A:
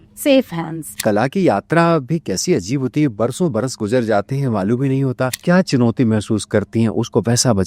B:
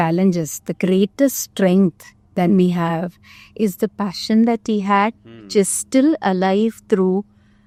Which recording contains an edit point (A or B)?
A